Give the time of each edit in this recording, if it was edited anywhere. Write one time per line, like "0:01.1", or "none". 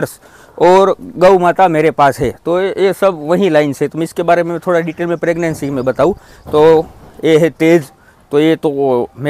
none